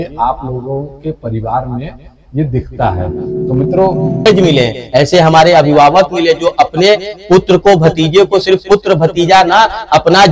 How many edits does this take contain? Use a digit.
1